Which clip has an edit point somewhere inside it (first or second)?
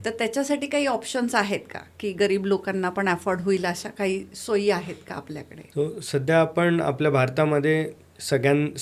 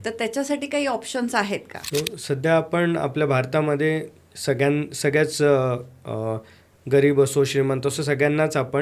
second